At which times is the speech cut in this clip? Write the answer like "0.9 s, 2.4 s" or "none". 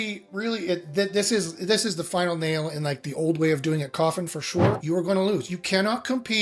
4.8 s